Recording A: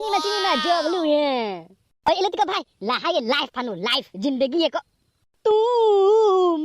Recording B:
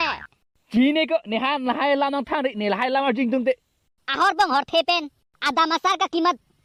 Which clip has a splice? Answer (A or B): A